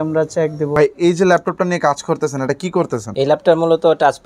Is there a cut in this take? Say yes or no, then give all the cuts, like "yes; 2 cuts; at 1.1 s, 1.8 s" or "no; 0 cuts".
yes; 2 cuts; at 0.8 s, 3.1 s